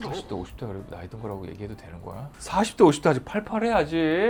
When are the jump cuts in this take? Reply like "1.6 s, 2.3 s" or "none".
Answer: none